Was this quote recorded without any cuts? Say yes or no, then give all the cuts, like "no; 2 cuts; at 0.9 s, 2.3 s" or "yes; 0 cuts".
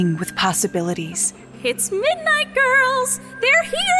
yes; 0 cuts